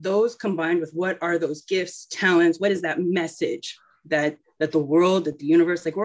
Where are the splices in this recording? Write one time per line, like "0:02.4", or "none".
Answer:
0:04.4